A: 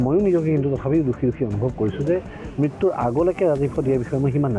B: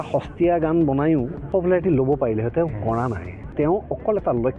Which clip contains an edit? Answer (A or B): B